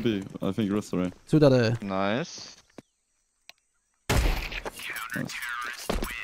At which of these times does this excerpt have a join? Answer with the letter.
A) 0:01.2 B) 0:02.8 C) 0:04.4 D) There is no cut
B